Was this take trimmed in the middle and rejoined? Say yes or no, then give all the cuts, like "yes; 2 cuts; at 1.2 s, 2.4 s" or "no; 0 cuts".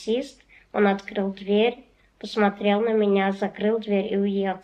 no; 0 cuts